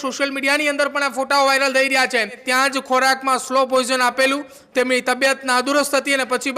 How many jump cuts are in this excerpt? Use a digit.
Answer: 1